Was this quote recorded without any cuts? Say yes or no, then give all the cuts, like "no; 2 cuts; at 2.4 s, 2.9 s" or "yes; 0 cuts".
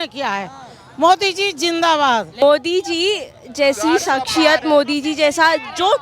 no; 1 cut; at 2.4 s